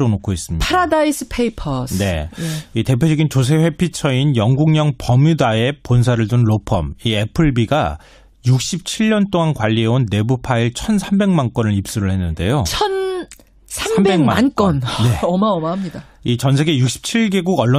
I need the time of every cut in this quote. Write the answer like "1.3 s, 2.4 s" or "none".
none